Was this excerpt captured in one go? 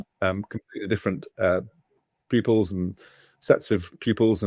yes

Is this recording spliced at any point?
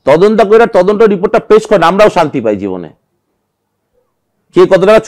no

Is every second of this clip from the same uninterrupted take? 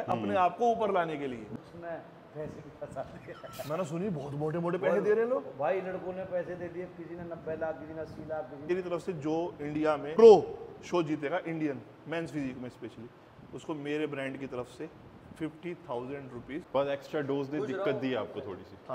no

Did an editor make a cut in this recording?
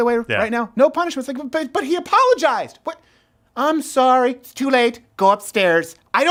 no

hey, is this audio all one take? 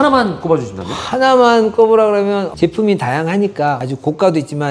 no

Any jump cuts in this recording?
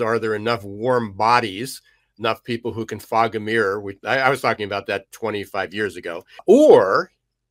yes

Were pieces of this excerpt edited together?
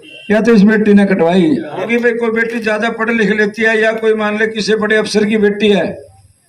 yes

